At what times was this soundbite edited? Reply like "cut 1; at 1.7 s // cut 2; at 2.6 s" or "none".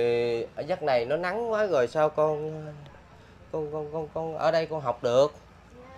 none